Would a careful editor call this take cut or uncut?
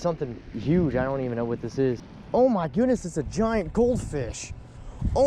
cut